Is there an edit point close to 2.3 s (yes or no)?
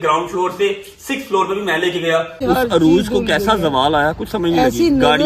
yes